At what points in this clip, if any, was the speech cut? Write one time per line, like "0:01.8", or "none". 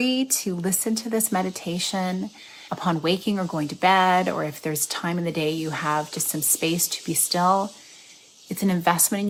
none